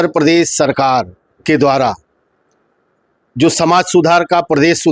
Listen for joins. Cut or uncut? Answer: uncut